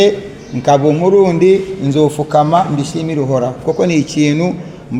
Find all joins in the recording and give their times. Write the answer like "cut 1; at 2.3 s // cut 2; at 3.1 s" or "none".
none